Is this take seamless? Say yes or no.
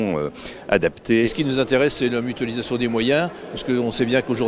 no